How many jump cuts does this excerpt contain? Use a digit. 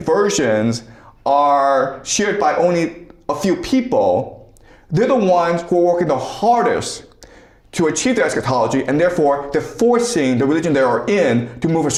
0